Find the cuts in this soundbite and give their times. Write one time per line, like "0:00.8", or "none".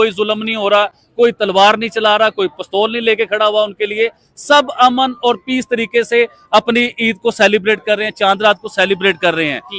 none